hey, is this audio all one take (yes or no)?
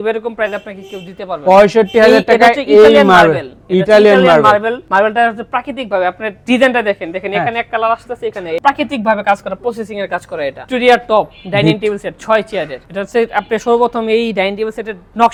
yes